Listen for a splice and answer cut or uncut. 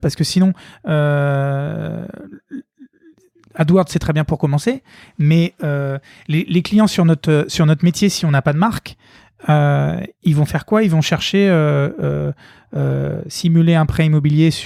uncut